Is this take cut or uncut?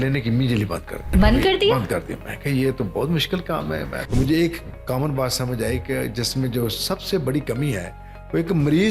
cut